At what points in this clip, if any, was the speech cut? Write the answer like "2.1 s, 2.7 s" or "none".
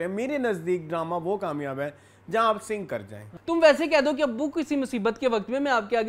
3.3 s